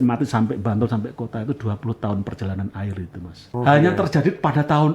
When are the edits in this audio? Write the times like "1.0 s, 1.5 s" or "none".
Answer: 3.5 s